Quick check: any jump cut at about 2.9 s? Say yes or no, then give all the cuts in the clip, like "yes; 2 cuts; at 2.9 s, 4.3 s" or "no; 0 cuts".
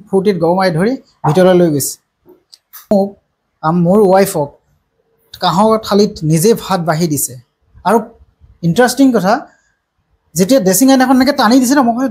yes; 1 cut; at 2.9 s